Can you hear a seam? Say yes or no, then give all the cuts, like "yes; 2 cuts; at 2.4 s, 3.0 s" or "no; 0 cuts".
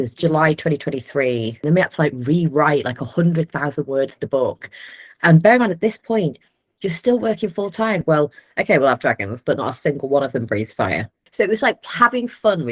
yes; 3 cuts; at 1.6 s, 8.0 s, 11.1 s